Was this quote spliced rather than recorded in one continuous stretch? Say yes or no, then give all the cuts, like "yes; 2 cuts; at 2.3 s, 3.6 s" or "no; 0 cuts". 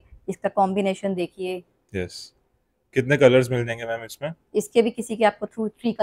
no; 0 cuts